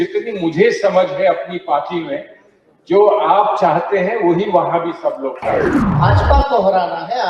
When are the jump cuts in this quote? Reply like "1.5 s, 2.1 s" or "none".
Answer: 5.8 s